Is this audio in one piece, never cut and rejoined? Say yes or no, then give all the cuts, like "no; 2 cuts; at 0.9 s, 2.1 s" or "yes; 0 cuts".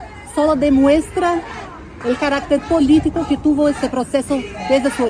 yes; 0 cuts